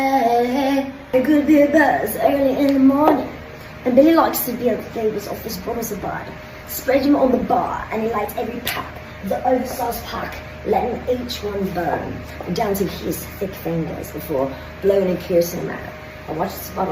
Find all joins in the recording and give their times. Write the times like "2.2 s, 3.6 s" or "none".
0.9 s